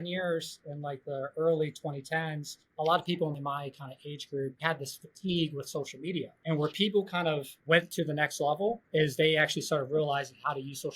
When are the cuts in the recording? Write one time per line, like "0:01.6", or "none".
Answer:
0:04.6
0:07.6